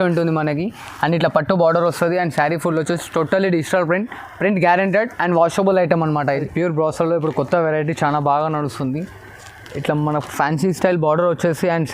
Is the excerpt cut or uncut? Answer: cut